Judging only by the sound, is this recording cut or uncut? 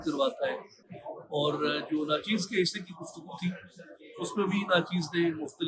uncut